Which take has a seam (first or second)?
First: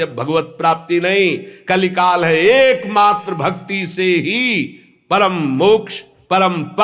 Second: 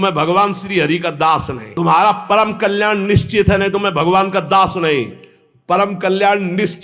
second